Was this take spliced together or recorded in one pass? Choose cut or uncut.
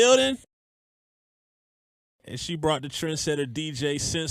uncut